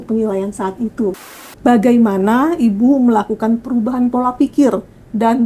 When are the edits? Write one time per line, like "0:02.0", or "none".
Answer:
0:01.1